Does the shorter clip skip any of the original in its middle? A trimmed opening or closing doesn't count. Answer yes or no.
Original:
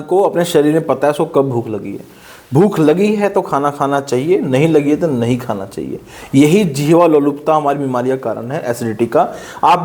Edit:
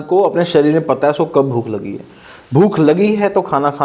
no